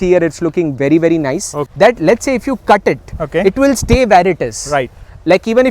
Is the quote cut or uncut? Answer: cut